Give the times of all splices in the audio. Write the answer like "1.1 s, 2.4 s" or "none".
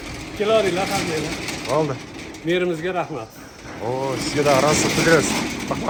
none